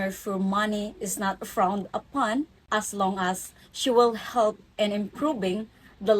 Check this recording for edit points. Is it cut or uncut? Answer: cut